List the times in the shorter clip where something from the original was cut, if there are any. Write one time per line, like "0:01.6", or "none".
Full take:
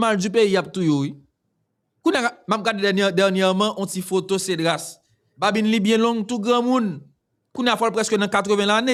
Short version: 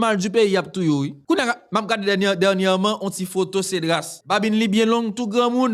0:01.2
0:04.1